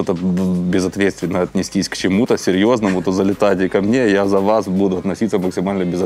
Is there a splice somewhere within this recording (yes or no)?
no